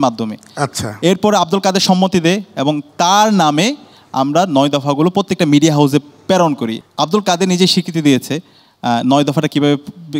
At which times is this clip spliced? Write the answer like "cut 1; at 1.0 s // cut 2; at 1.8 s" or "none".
cut 1; at 6.8 s